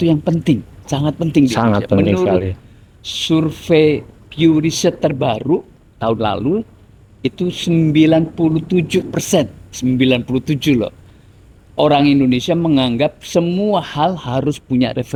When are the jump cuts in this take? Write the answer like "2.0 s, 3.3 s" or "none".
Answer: none